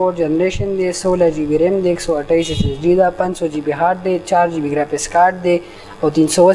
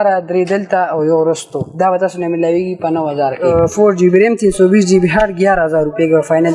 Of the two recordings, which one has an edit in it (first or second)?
second